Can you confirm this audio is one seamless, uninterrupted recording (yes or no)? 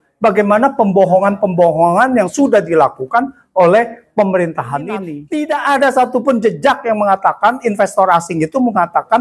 no